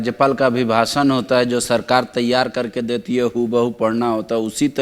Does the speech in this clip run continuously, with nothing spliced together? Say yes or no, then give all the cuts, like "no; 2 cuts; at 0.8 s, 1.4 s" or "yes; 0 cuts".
yes; 0 cuts